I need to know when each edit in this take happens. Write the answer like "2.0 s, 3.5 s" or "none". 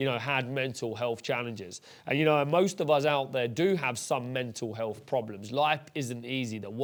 none